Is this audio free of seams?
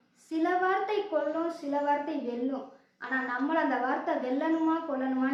yes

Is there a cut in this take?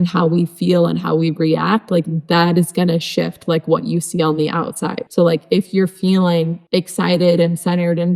yes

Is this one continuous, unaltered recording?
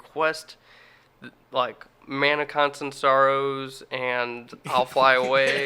yes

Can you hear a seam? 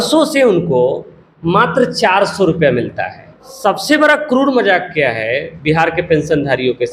yes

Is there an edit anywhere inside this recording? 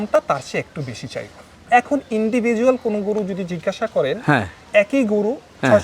yes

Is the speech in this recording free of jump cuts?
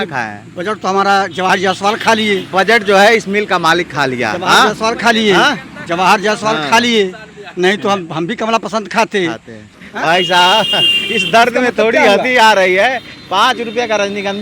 no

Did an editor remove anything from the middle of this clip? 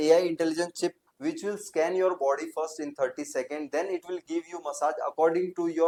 no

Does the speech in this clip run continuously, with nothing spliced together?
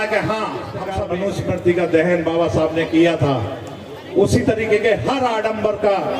no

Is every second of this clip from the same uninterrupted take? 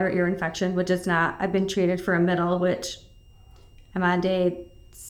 yes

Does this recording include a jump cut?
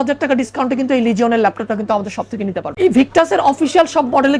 yes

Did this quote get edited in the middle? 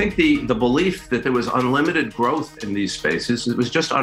no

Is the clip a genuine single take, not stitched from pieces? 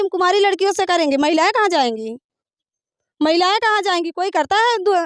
yes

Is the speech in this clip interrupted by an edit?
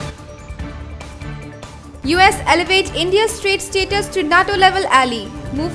yes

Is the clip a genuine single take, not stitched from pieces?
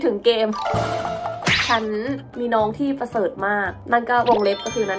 no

